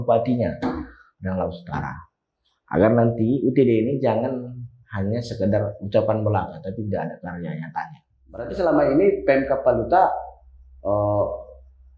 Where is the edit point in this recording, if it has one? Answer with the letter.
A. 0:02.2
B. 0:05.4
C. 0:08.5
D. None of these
C